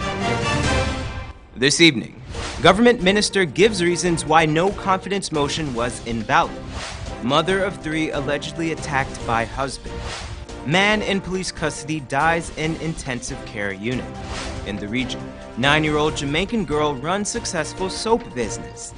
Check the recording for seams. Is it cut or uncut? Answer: cut